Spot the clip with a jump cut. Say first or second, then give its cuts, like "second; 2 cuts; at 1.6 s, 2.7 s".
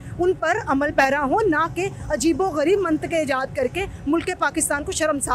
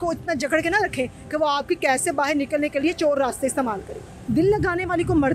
second; 1 cut; at 4.1 s